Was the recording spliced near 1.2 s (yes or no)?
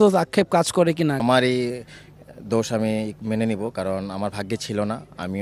yes